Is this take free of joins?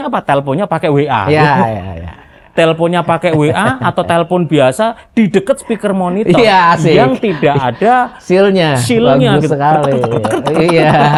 yes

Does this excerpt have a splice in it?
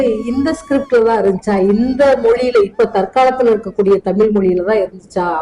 no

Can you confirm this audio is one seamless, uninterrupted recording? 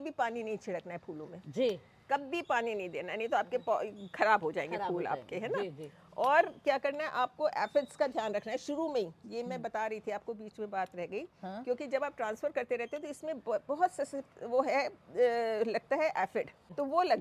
yes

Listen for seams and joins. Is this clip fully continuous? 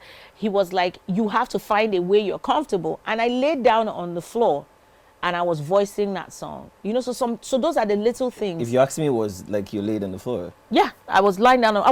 yes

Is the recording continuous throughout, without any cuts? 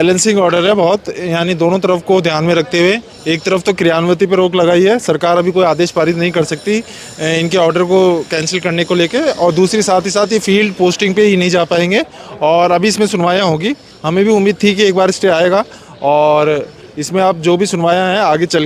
yes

